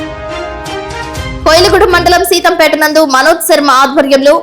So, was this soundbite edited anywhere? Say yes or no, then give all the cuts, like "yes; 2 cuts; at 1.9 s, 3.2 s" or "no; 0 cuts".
yes; 1 cut; at 1.0 s